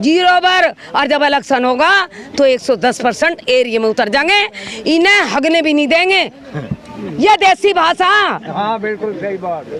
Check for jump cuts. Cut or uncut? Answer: uncut